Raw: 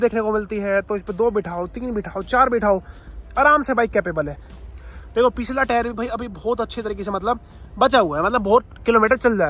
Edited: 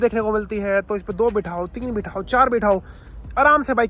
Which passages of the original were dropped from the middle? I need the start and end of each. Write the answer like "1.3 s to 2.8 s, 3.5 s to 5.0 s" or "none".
none